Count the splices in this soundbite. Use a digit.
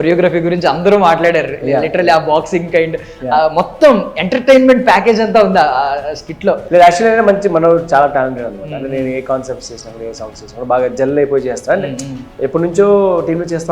1